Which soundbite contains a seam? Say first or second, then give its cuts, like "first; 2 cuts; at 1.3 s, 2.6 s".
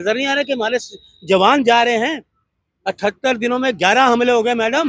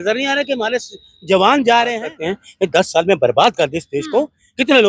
second; 1 cut; at 2.1 s